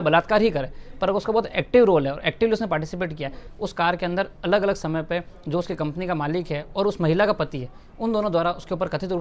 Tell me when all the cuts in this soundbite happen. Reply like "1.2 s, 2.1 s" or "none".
3.4 s